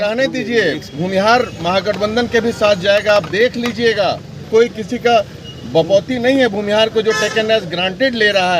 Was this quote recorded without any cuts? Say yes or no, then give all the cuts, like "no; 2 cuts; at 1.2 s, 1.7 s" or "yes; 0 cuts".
no; 1 cut; at 4.5 s